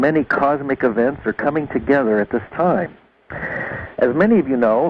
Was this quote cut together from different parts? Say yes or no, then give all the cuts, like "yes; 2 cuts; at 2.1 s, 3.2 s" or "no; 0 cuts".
no; 0 cuts